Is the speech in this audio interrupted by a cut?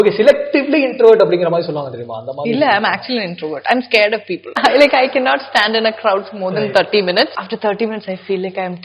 yes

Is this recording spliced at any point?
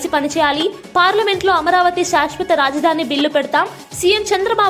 no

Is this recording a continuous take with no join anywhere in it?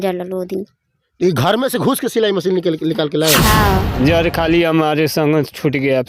no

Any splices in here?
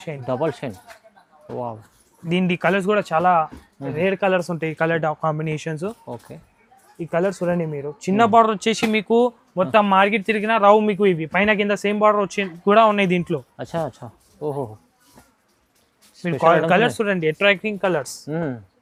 no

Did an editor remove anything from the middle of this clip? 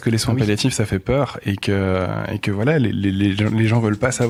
no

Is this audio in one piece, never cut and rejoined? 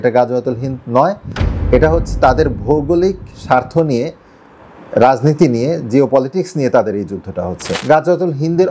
no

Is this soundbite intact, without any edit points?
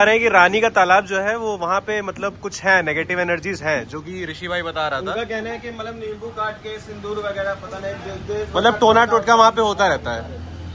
yes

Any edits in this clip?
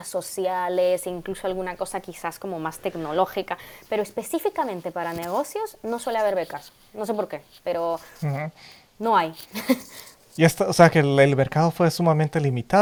no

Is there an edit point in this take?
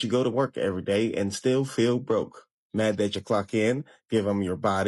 no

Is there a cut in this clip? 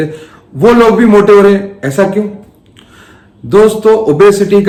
no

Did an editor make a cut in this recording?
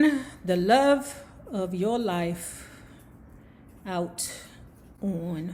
no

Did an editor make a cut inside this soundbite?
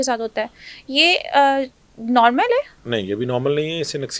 no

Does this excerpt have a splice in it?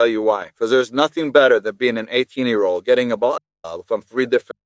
no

